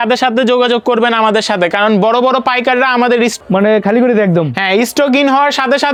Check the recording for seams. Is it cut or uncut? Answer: uncut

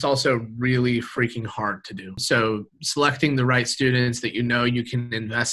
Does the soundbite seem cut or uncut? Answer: cut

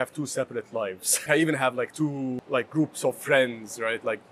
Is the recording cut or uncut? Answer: cut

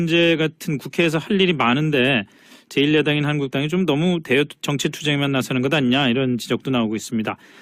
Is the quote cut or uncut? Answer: uncut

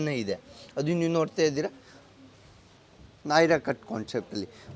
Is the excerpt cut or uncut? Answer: uncut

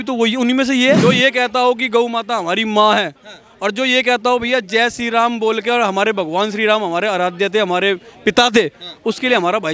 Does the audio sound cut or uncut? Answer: cut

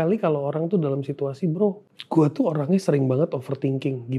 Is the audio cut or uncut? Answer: cut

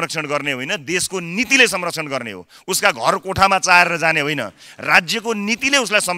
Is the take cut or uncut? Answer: uncut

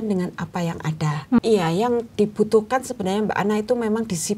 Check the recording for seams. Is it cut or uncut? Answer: cut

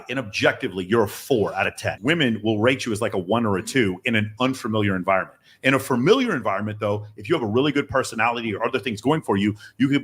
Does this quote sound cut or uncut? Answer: cut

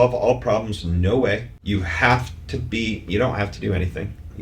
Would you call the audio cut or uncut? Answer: cut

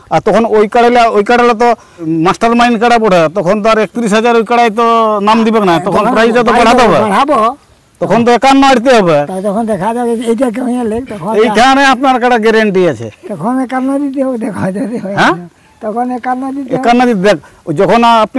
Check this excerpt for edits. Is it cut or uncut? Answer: cut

